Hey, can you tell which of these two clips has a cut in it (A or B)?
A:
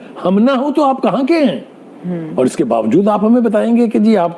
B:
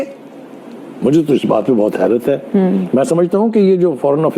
A